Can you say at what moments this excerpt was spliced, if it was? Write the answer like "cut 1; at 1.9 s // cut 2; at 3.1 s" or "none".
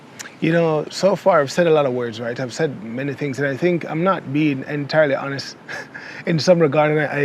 none